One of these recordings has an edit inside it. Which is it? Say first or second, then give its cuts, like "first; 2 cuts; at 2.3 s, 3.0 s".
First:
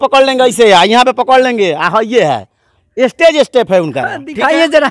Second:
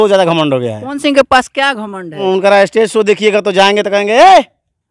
second; 1 cut; at 2.2 s